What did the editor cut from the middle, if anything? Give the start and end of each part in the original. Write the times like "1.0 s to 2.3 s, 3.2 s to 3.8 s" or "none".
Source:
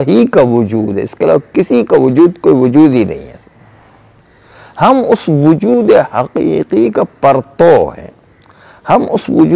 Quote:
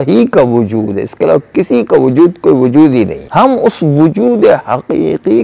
3.2 s to 4.7 s